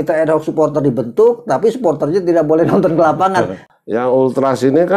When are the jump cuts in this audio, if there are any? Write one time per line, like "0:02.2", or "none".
0:03.6